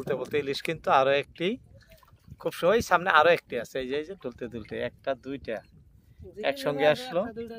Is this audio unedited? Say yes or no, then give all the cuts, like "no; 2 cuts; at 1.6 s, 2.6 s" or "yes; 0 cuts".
yes; 0 cuts